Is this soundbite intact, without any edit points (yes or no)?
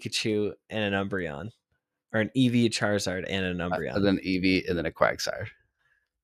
yes